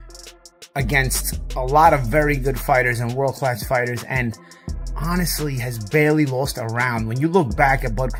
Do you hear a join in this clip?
no; 0 cuts

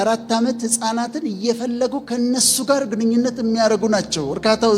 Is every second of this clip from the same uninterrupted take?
yes; 0 cuts

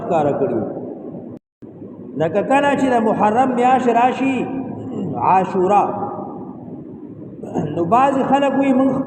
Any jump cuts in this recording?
yes; 1 cut; at 1.5 s

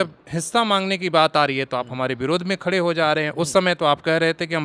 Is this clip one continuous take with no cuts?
yes; 0 cuts

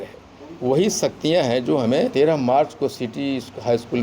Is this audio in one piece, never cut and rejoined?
no; 1 cut; at 2.1 s

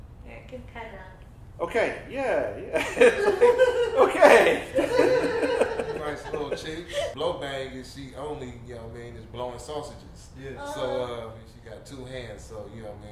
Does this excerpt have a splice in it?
yes; 1 cut; at 7.1 s

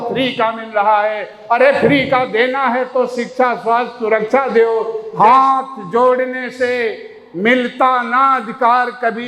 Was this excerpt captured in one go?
no; 1 cut; at 5.0 s

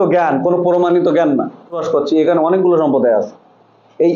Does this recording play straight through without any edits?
no; 1 cut; at 1.8 s

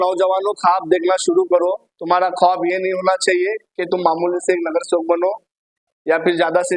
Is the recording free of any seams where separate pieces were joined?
yes; 0 cuts

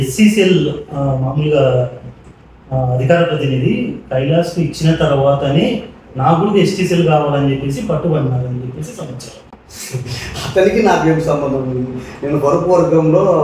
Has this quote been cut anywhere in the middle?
no; 0 cuts

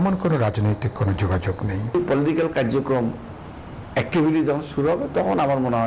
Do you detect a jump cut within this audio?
yes; 1 cut; at 1.9 s

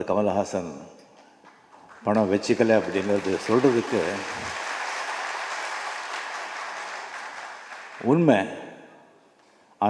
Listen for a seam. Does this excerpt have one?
no; 0 cuts

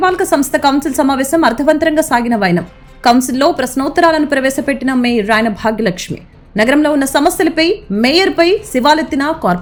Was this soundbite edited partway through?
no; 0 cuts

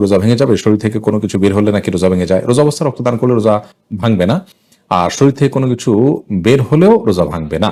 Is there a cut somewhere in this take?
no; 0 cuts

